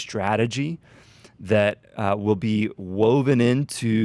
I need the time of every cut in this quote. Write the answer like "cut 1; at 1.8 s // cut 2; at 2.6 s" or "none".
none